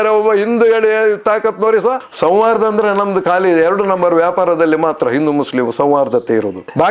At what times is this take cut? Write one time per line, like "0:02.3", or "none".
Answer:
0:02.0